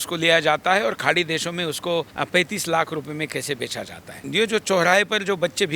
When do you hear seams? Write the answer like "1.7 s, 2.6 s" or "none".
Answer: 2.1 s, 4.2 s